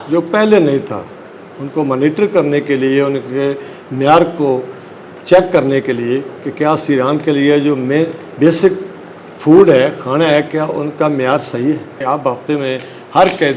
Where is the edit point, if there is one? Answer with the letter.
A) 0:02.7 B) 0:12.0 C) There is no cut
B